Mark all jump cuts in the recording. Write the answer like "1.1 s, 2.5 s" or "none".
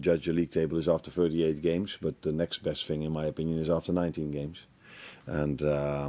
none